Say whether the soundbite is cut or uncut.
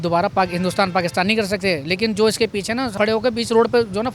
uncut